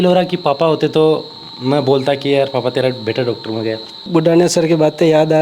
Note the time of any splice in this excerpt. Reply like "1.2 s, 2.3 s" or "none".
4.0 s